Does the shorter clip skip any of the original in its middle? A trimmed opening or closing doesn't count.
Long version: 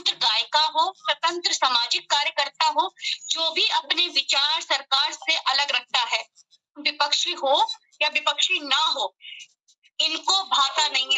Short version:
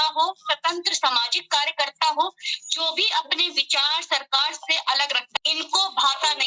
yes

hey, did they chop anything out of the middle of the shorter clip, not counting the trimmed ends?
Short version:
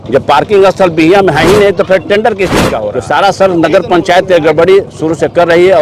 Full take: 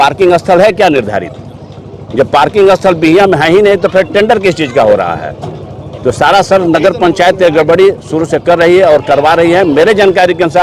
yes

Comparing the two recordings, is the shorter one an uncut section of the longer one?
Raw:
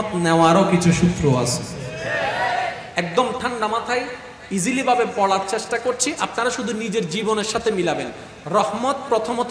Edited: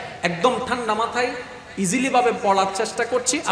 yes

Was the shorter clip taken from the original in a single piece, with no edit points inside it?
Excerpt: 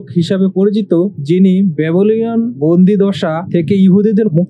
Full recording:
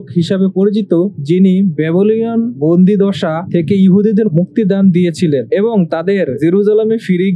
yes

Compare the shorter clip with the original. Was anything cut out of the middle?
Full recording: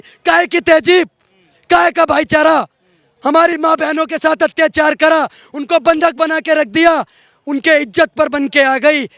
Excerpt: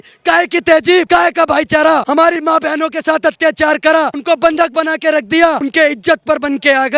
yes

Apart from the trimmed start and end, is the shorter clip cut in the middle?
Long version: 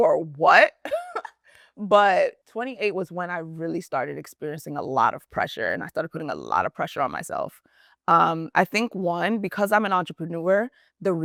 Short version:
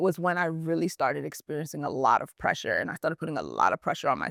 no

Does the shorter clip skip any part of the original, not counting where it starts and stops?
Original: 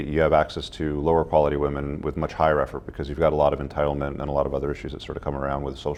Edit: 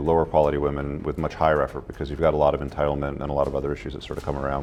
no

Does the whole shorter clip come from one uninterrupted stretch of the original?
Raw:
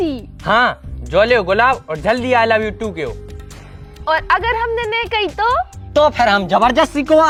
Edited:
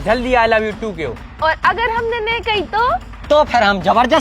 no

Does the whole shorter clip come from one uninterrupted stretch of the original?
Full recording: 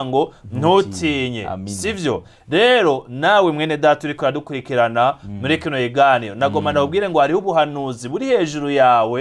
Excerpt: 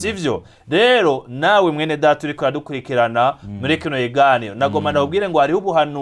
yes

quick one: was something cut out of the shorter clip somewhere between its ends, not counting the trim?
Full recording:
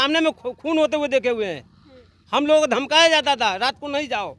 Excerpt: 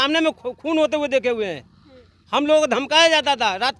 no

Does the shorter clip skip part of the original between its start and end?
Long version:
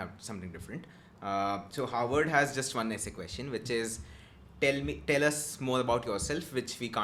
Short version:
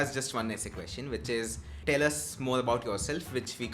yes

